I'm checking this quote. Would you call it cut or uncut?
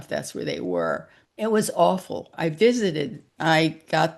cut